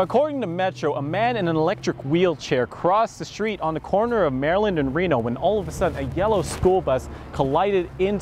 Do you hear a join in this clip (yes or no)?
no